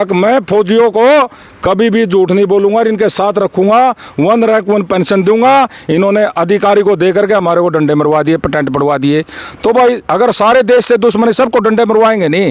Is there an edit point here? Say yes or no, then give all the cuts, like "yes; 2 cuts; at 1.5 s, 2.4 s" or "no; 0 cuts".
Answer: no; 0 cuts